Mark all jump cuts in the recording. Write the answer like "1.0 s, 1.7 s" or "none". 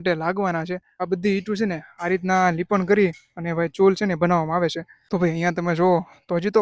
0.9 s, 5.0 s